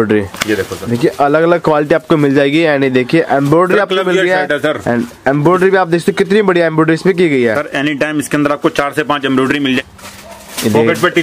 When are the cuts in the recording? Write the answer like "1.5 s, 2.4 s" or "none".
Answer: 9.9 s